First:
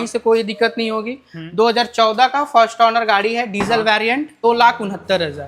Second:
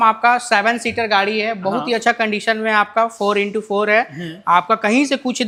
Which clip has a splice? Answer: first; 1 cut; at 4.4 s

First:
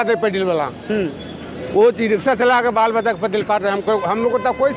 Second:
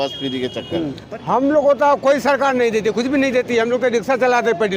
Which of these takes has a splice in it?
second; 1 cut; at 1.0 s

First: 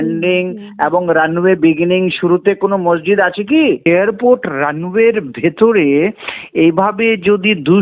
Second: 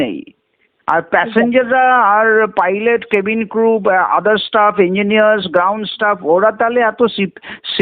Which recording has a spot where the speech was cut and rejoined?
first; 1 cut; at 3.9 s

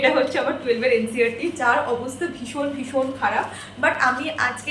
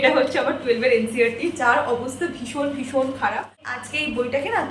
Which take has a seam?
second; 1 cut; at 3.7 s

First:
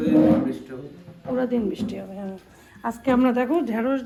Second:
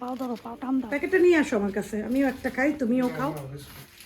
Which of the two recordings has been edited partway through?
second; 1 cut; at 0.9 s

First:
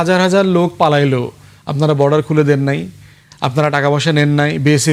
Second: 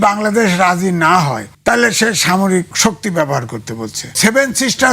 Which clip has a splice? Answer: second; 3 cuts; at 1.5 s, 2.7 s, 4.1 s

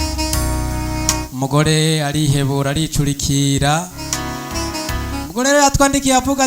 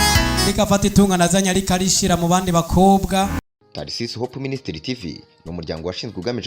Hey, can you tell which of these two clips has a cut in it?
second; 1 cut; at 3.4 s

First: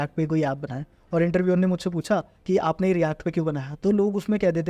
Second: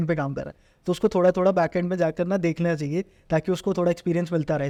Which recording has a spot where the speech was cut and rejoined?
first; 1 cut; at 2.3 s

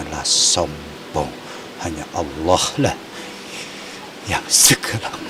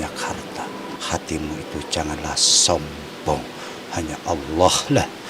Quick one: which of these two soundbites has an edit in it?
second; 1 cut; at 1.0 s

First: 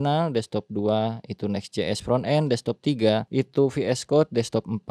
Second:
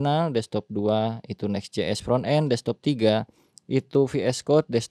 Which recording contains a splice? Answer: first; 1 cut; at 3.3 s

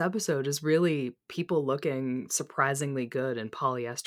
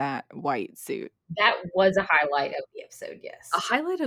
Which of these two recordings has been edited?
second; 2 cuts; at 1.3 s, 3.3 s

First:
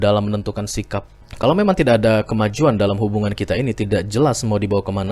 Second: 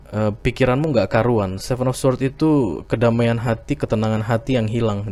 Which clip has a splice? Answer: first; 1 cut; at 1.2 s

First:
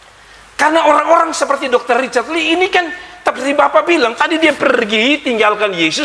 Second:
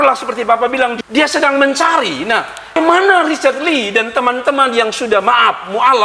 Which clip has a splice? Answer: second; 2 cuts; at 0.9 s, 2.7 s

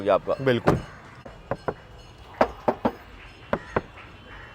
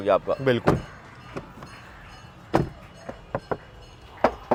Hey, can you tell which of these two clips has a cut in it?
first; 1 cut; at 1.1 s

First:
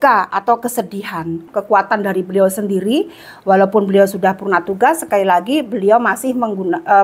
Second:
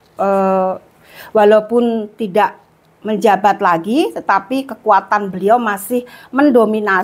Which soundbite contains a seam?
first; 1 cut; at 1.4 s

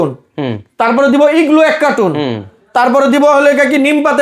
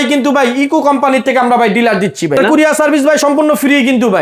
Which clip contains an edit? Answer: second; 1 cut; at 2.4 s

